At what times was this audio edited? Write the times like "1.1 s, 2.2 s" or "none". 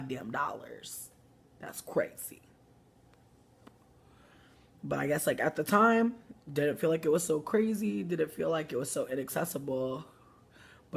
2.2 s